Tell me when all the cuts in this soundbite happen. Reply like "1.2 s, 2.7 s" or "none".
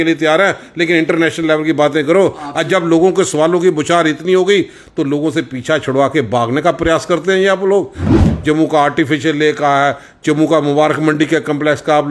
8.1 s